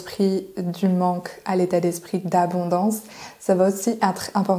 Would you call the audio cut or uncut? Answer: uncut